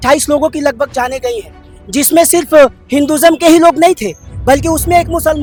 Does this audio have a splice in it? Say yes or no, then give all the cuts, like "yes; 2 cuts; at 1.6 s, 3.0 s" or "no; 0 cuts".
no; 0 cuts